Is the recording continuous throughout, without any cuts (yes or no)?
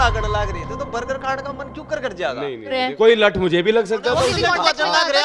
no